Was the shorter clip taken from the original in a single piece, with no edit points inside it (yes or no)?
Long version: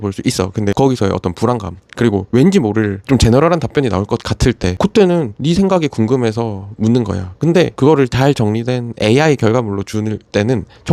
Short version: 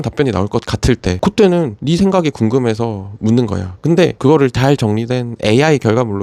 yes